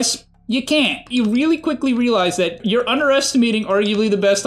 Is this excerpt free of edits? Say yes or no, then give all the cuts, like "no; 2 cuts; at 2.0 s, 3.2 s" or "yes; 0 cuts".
no; 2 cuts; at 1.0 s, 2.6 s